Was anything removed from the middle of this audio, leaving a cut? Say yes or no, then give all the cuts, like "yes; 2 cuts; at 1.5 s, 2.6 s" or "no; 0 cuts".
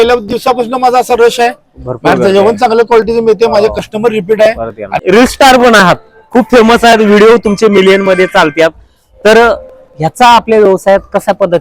yes; 1 cut; at 5.0 s